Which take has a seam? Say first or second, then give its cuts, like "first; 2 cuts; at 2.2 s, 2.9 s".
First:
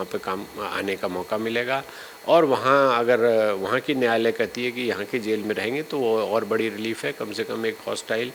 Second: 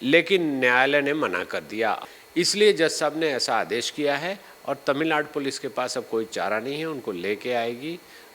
second; 1 cut; at 2.0 s